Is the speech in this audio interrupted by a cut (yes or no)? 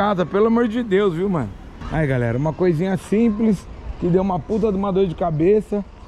no